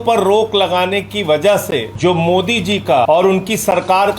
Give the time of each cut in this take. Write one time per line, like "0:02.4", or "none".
0:01.9
0:03.1